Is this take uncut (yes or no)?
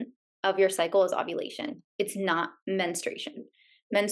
yes